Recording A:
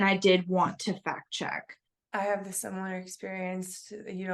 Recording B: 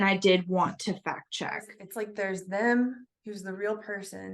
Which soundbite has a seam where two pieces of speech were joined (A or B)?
B